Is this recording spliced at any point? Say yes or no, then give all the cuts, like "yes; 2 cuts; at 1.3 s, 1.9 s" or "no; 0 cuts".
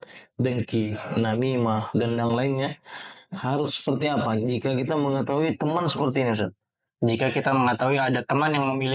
no; 0 cuts